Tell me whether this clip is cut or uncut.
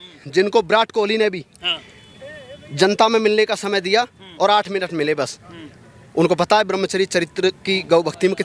uncut